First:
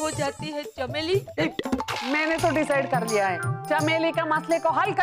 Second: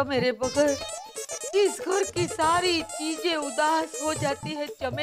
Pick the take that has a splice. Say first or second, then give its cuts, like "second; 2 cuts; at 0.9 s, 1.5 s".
first; 2 cuts; at 1.9 s, 3.5 s